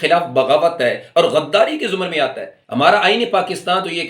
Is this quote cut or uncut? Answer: uncut